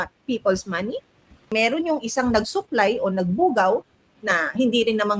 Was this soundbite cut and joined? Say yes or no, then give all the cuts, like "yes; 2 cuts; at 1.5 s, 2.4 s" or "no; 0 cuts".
yes; 1 cut; at 1.5 s